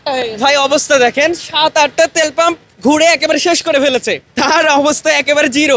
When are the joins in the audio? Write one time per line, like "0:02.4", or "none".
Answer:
0:02.7
0:04.2